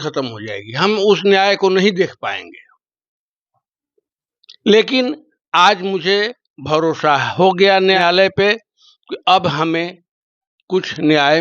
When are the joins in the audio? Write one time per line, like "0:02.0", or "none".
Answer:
0:08.0